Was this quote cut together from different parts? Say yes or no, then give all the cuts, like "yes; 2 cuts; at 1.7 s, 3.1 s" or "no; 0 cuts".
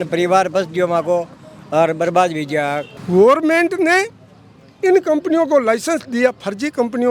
yes; 1 cut; at 2.9 s